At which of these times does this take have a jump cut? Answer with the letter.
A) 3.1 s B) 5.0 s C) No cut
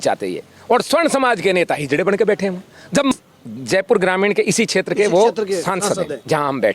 A